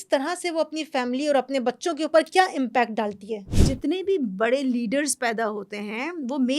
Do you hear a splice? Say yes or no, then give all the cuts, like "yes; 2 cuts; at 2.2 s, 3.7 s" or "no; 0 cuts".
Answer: yes; 1 cut; at 3.5 s